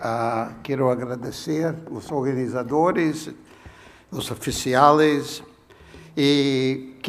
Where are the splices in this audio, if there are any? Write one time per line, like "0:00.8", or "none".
0:02.8